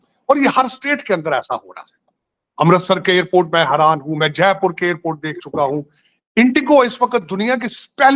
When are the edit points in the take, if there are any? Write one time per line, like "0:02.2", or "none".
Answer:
none